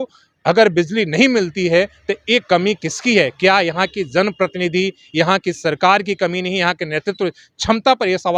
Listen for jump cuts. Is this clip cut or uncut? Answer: uncut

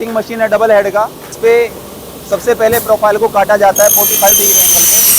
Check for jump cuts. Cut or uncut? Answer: cut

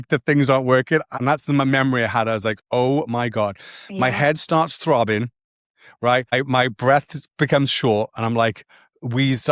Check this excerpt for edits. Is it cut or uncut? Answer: cut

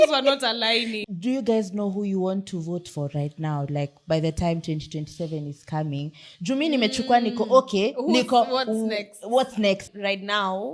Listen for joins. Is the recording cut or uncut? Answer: cut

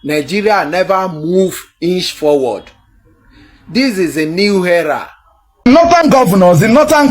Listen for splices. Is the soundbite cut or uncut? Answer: cut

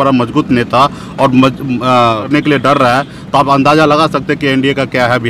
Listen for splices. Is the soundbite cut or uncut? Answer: cut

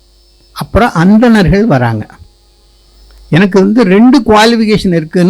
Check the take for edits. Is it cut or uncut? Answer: uncut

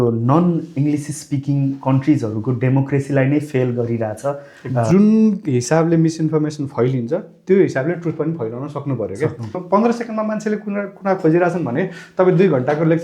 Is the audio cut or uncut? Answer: cut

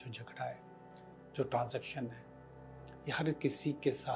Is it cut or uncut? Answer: uncut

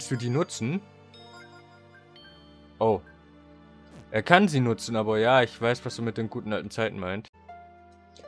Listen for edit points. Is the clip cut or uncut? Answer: cut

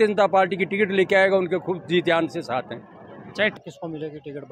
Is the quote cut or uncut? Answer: cut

